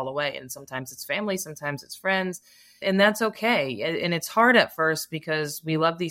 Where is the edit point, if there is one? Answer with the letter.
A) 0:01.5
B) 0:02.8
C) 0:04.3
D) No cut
B